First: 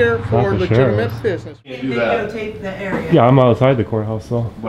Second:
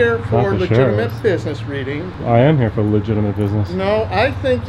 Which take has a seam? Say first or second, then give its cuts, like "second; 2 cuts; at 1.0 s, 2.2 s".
first; 1 cut; at 1.8 s